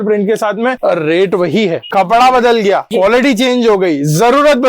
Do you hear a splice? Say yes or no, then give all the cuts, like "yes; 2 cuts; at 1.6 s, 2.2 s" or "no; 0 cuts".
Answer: yes; 3 cuts; at 0.8 s, 1.8 s, 2.9 s